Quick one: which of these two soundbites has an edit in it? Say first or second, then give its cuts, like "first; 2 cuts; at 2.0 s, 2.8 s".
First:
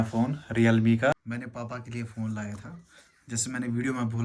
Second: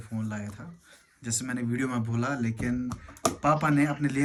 first; 1 cut; at 1.1 s